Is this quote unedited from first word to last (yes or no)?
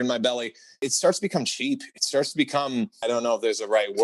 no